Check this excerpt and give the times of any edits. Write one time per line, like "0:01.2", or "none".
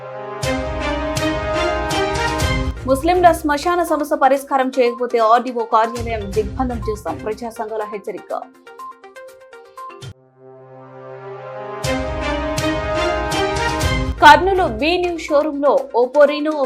0:02.7